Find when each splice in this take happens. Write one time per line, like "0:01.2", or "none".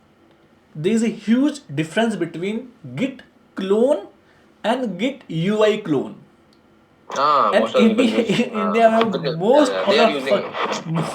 none